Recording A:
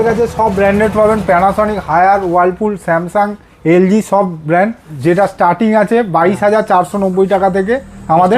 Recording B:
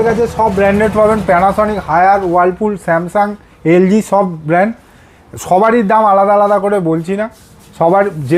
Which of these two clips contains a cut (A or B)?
A